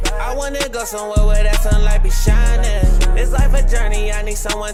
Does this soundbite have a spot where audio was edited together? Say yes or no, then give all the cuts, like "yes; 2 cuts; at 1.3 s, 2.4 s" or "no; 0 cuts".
no; 0 cuts